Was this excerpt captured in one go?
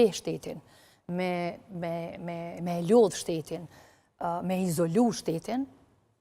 yes; 0 cuts

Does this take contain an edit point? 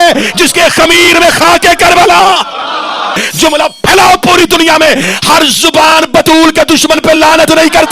yes; 1 cut; at 3.2 s

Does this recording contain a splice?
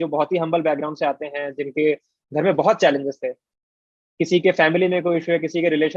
no; 0 cuts

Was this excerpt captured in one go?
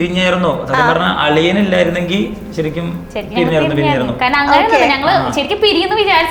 yes; 0 cuts

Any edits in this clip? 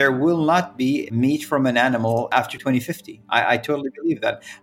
yes; 2 cuts; at 1.1 s, 2.4 s

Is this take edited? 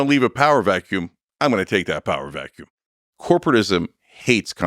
yes; 1 cut; at 2.9 s

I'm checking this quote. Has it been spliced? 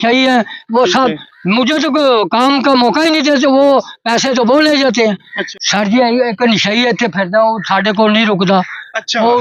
yes; 1 cut; at 5.4 s

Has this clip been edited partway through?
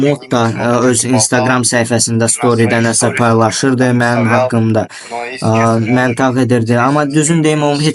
no; 0 cuts

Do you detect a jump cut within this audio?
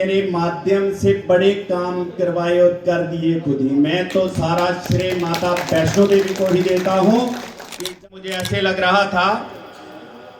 yes; 1 cut; at 7.7 s

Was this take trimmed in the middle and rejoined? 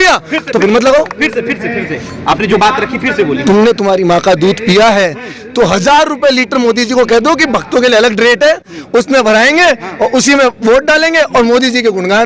no; 0 cuts

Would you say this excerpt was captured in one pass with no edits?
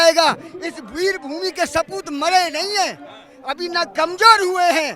yes; 0 cuts

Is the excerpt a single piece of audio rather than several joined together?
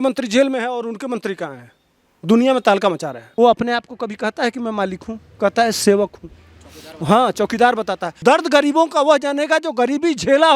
no; 2 cuts; at 3.2 s, 8.0 s

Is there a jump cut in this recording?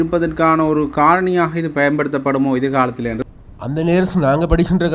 yes; 1 cut; at 3.2 s

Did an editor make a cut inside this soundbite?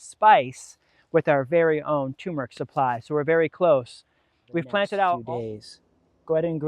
yes; 1 cut; at 5.2 s

